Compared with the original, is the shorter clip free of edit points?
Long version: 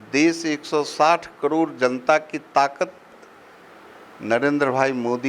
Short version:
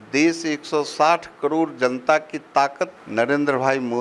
no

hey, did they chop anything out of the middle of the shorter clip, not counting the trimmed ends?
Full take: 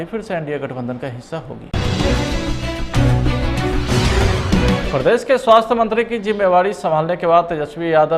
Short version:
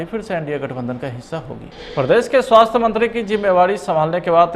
yes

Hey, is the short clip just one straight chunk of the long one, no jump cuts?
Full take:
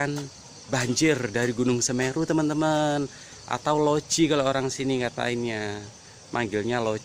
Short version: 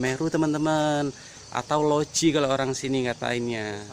yes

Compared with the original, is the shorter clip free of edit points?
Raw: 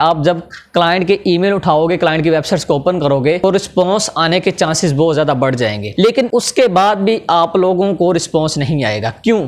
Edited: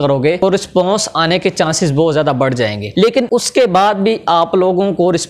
yes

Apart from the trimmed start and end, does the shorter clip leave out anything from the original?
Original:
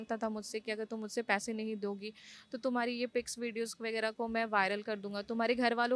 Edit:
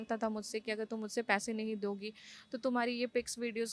no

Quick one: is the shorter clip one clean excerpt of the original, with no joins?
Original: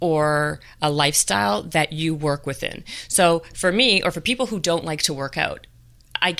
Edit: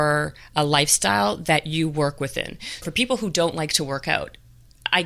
no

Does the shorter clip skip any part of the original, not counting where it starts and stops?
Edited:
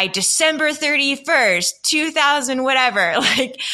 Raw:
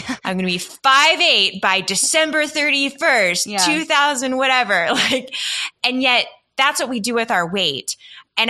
no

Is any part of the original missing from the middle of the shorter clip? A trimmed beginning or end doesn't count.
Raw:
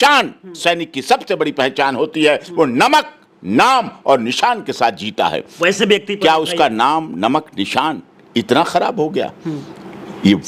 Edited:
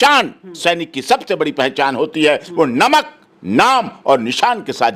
no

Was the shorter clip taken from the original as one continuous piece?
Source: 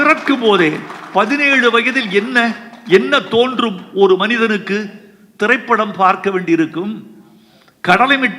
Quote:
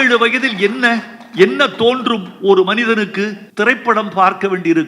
no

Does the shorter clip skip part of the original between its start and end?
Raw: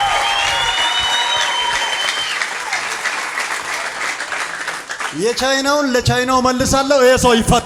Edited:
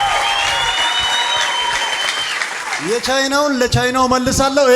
yes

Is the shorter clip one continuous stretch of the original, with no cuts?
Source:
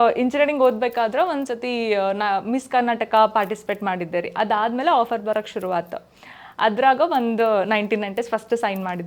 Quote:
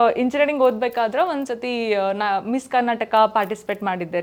yes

